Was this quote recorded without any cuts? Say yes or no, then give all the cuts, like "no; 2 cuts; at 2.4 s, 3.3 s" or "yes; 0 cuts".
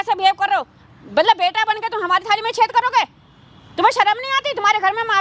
yes; 0 cuts